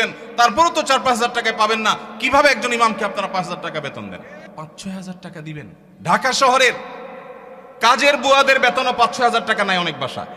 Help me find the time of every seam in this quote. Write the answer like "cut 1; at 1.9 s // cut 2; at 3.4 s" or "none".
cut 1; at 4.4 s // cut 2; at 5.8 s